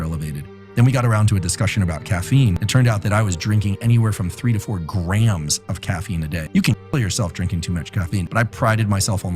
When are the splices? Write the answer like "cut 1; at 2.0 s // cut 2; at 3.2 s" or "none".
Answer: cut 1; at 2.6 s // cut 2; at 6.4 s // cut 3; at 8.3 s